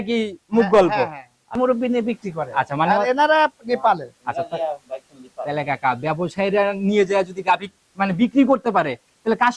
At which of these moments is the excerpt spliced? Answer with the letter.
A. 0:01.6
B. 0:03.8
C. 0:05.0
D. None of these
A